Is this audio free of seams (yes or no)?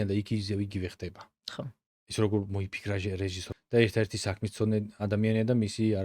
no